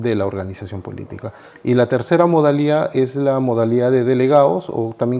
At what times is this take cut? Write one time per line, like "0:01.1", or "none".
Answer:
none